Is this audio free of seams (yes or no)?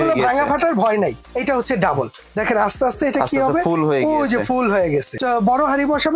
no